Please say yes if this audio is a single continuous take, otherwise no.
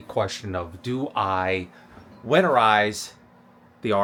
yes